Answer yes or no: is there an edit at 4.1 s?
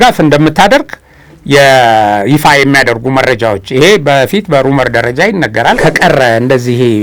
no